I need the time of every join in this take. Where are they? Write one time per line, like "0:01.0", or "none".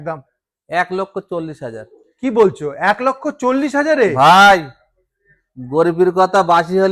none